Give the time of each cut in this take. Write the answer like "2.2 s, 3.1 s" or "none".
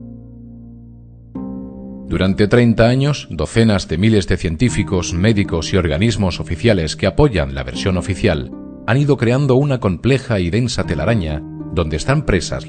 2.0 s